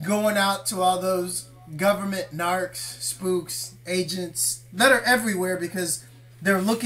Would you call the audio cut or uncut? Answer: cut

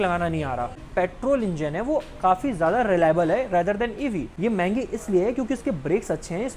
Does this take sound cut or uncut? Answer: cut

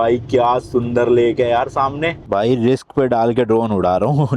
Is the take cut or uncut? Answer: cut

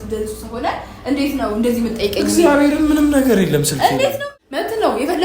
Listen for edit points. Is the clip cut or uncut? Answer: cut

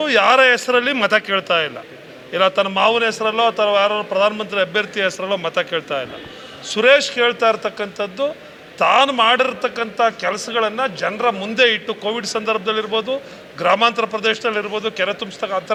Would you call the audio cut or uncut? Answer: uncut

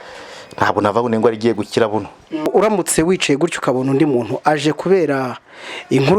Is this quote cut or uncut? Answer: cut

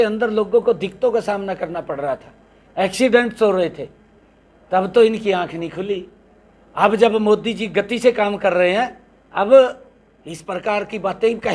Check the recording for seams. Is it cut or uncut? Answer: uncut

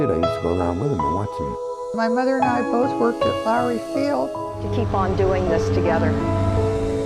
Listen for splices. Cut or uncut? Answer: uncut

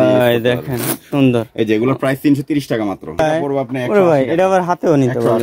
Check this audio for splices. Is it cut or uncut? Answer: cut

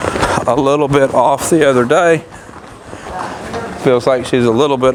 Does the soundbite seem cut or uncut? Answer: uncut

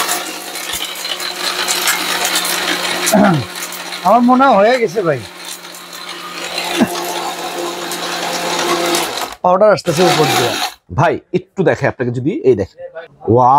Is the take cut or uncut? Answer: uncut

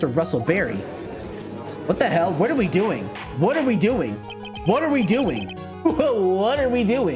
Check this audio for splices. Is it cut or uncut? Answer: uncut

